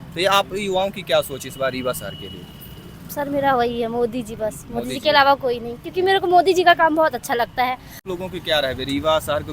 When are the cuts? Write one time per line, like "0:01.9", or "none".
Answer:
0:08.1